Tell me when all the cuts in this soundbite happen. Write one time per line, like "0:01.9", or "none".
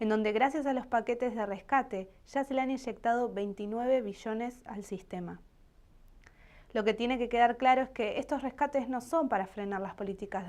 0:07.1